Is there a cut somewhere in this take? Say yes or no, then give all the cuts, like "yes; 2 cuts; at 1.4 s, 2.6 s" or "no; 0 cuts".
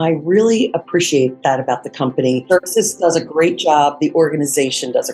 yes; 1 cut; at 2.4 s